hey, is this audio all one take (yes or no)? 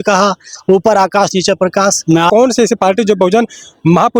no